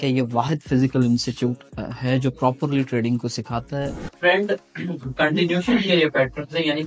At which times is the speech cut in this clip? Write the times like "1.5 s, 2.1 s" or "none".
4.0 s